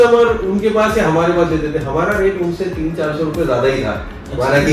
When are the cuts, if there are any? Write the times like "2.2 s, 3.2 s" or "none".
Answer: none